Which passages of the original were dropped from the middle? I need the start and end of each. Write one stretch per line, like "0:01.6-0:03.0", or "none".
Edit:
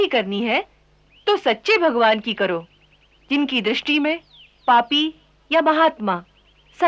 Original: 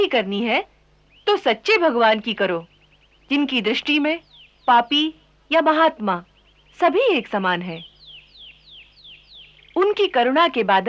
none

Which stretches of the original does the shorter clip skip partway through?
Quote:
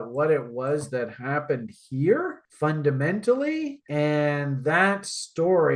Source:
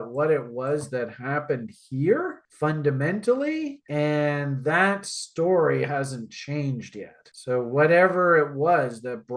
none

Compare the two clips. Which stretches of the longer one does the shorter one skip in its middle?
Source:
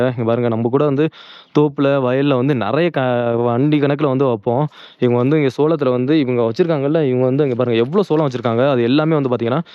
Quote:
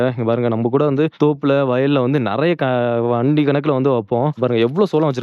0:01.1-0:01.5
0:04.7-0:07.6

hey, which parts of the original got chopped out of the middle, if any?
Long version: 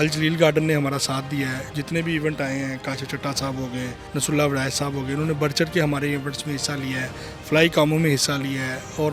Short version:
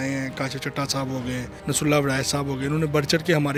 none

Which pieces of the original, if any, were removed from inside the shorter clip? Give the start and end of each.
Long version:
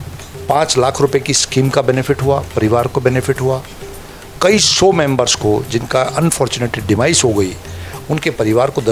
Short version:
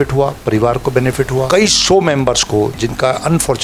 0:03.6-0:04.4

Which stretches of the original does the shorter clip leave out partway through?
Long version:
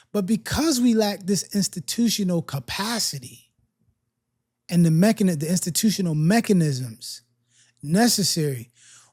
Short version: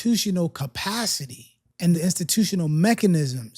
0:03.9-0:05.4

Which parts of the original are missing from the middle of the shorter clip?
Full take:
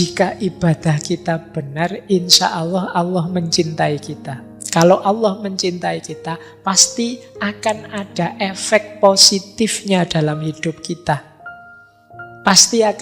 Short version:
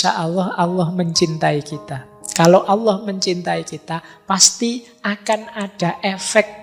none

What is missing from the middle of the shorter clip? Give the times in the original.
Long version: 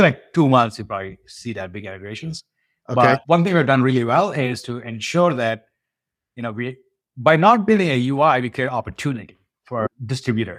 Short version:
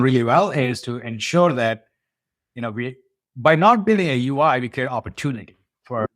none

